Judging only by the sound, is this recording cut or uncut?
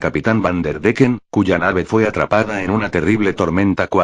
uncut